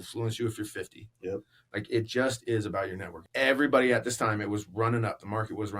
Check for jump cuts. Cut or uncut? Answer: cut